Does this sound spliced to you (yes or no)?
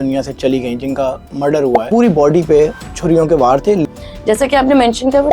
yes